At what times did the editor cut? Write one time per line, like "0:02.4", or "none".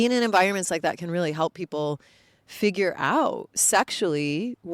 0:03.5